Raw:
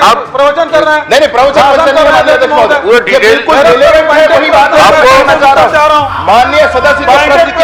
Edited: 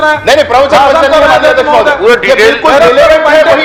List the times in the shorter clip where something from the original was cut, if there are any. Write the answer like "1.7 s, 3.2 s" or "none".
none